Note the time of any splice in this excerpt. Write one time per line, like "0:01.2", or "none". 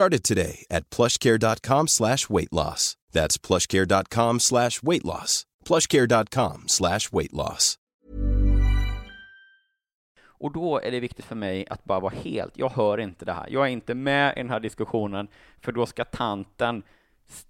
0:07.9
0:10.1